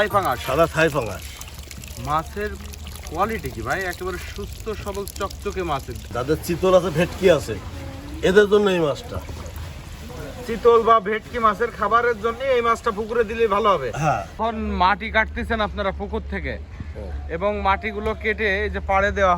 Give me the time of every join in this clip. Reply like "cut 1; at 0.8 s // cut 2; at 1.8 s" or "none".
cut 1; at 6.0 s // cut 2; at 14.4 s